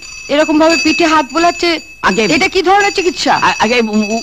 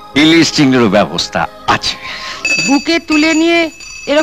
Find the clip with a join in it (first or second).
second